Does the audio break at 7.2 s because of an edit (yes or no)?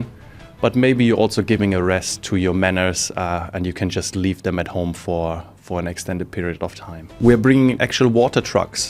yes